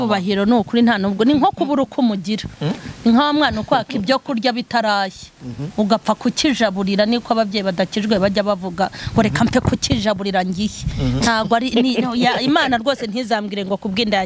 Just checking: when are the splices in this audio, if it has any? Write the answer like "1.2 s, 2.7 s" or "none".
none